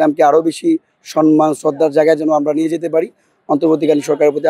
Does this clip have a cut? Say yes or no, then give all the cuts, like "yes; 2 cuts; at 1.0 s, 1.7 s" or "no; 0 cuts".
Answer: no; 0 cuts